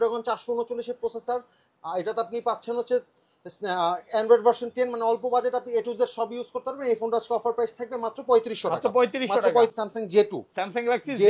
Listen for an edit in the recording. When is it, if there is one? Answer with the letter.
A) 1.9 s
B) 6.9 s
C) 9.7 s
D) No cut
C